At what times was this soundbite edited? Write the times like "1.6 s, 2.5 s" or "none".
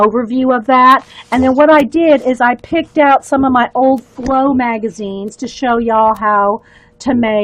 none